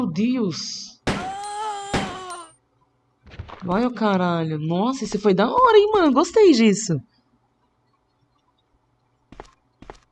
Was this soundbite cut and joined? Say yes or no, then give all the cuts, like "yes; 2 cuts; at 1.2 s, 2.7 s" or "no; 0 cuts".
no; 0 cuts